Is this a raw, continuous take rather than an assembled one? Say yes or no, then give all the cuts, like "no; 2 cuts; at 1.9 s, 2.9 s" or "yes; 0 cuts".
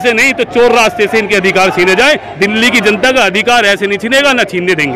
yes; 0 cuts